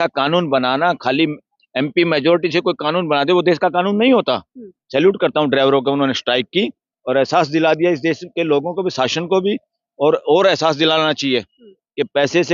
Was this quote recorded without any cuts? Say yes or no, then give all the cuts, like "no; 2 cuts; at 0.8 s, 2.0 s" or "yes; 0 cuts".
no; 1 cut; at 4.8 s